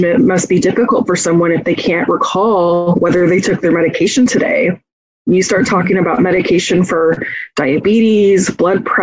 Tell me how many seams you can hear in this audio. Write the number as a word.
zero